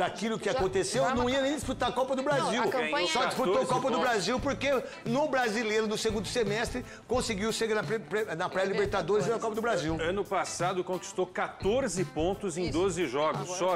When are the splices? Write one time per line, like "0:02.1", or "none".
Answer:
none